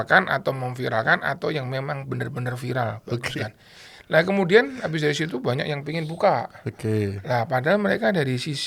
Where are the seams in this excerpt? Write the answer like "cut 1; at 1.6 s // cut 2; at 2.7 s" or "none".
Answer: none